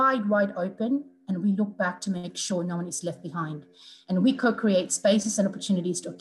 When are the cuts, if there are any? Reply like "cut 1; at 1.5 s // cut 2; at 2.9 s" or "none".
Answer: none